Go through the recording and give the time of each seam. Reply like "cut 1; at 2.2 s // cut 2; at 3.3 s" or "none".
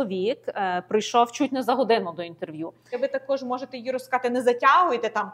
cut 1; at 3.0 s